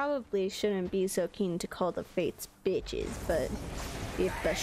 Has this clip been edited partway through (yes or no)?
no